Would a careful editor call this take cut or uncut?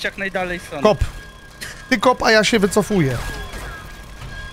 uncut